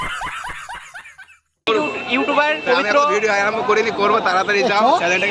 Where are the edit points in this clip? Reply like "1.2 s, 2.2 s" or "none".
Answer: 1.7 s